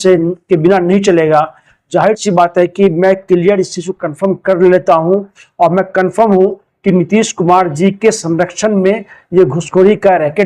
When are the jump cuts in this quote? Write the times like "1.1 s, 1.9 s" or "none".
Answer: none